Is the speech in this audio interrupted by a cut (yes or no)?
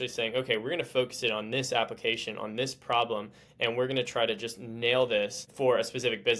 no